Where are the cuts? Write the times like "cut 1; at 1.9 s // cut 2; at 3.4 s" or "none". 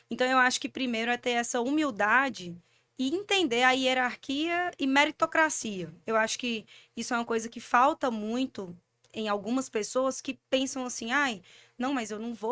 none